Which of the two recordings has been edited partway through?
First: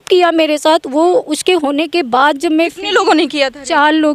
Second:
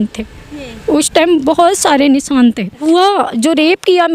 second; 1 cut; at 2.8 s

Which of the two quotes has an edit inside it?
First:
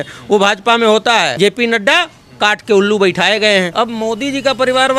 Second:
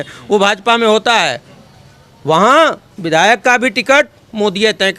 first; 2 cuts; at 1.3 s, 3.7 s

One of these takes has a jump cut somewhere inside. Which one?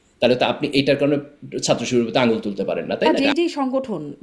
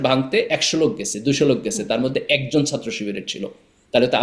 first; 1 cut; at 3.2 s

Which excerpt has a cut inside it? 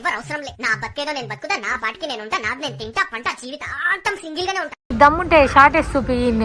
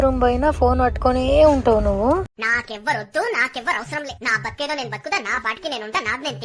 first; 1 cut; at 4.9 s

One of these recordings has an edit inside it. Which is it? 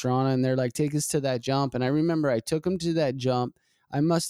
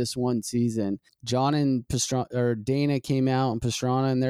second; 1 cut; at 1.1 s

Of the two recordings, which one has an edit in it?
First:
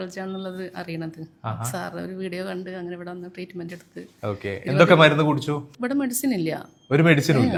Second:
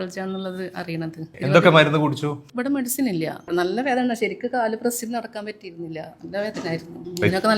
second; 2 cuts; at 1.3 s, 3.4 s

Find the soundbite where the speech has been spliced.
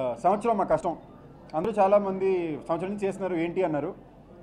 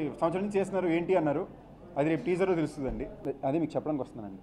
second; 1 cut; at 3.2 s

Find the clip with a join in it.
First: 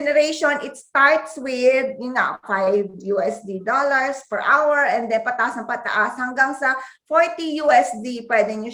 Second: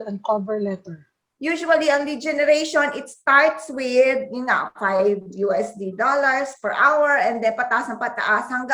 second; 1 cut; at 1.3 s

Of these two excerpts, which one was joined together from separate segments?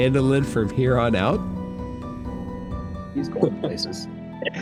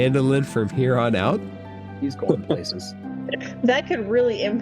second; 1 cut; at 1.5 s

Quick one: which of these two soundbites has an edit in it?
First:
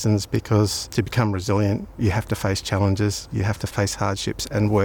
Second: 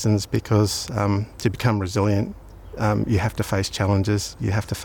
first; 3 cuts; at 0.8 s, 2.0 s, 3.6 s

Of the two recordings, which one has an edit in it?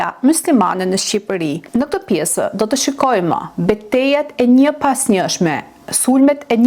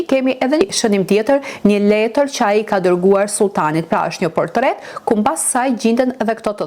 first; 1 cut; at 1.6 s

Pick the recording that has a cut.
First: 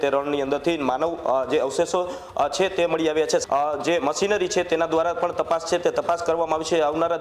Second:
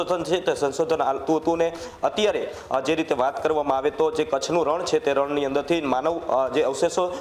first; 1 cut; at 3.4 s

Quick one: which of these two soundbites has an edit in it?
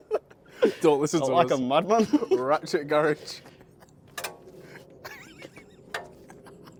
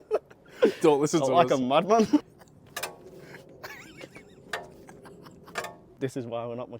second; 2 cuts; at 2.2 s, 5.9 s

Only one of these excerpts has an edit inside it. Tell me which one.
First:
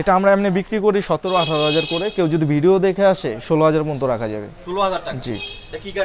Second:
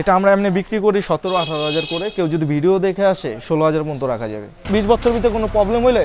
second; 1 cut; at 4.6 s

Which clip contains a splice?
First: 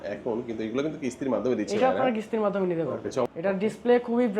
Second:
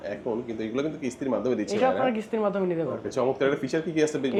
first; 1 cut; at 3.2 s

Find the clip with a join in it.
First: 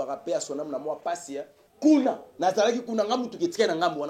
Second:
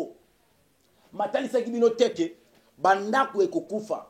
first; 1 cut; at 1.6 s

